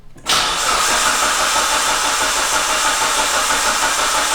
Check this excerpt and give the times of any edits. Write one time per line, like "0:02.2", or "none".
none